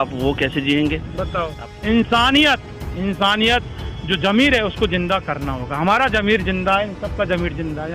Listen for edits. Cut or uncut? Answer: cut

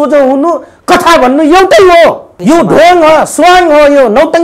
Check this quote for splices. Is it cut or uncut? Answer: cut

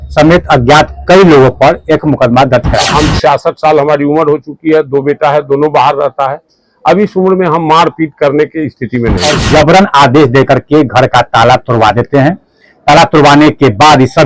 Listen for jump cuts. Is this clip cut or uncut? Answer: cut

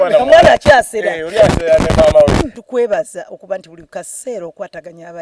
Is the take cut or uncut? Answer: cut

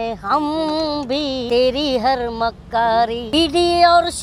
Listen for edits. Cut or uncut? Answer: cut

